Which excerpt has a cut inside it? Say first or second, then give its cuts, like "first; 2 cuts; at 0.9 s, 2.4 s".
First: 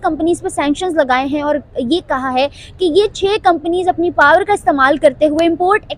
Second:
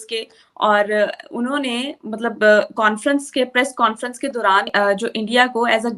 second; 1 cut; at 4.7 s